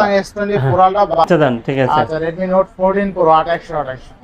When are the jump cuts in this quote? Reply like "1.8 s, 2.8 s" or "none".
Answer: 1.1 s